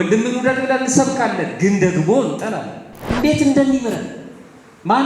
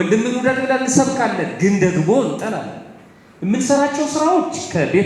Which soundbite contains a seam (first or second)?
first